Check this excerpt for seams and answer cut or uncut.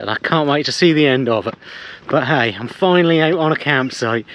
uncut